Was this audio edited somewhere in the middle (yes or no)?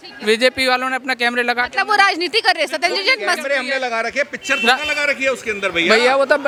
no